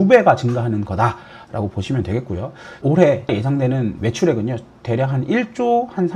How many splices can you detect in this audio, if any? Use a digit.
2